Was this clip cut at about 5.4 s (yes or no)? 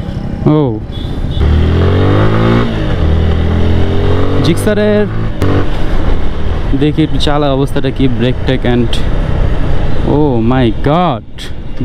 yes